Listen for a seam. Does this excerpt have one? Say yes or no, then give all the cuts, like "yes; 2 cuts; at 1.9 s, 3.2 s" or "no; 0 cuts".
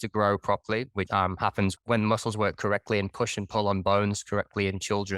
no; 0 cuts